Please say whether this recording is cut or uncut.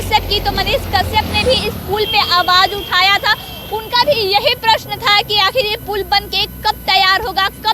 uncut